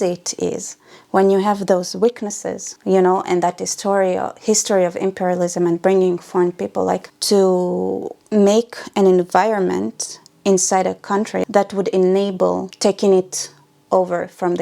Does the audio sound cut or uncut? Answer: cut